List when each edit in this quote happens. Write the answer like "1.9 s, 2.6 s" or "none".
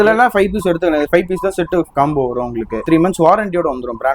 2.8 s